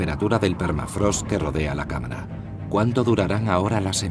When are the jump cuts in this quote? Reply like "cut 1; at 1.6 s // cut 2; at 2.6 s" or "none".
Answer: cut 1; at 2.6 s